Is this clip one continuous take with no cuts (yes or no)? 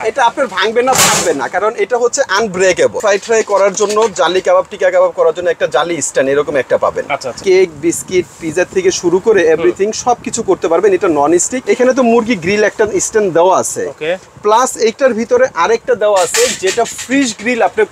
no